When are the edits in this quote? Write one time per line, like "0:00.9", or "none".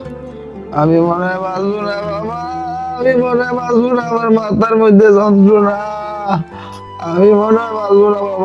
none